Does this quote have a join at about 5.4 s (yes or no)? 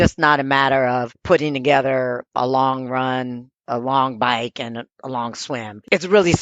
no